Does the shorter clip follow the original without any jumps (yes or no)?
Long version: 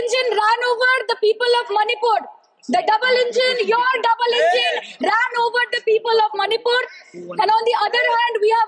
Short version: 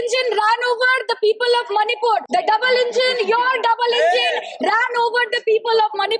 no